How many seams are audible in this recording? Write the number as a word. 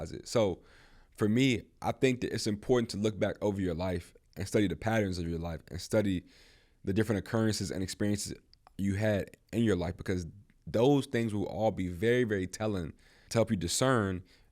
one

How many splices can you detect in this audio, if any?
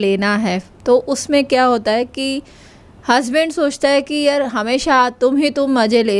zero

